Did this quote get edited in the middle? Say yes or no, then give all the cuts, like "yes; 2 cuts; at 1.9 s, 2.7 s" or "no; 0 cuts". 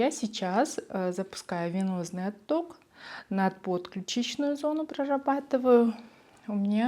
no; 0 cuts